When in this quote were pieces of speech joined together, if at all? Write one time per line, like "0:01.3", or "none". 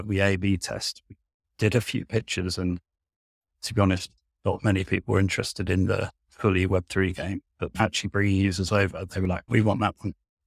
0:07.7
0:09.4